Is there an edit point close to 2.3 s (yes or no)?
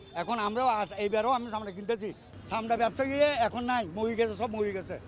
yes